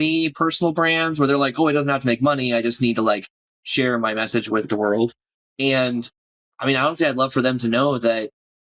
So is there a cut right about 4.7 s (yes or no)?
yes